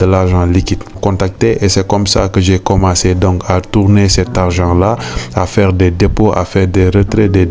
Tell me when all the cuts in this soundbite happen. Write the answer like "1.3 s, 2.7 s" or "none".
1.0 s

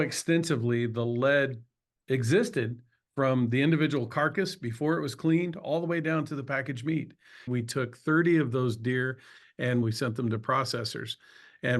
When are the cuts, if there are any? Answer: 7.5 s, 9.8 s

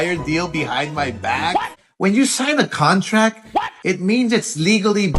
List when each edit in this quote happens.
1.8 s

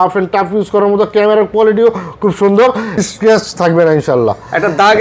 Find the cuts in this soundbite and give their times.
3.0 s

